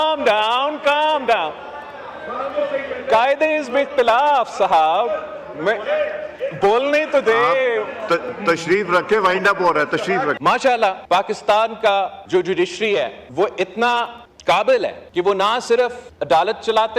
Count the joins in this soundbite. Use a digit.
7